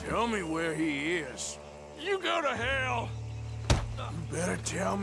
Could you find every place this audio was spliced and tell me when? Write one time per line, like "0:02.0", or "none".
none